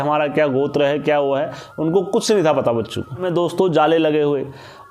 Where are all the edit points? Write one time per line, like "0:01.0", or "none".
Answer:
0:03.2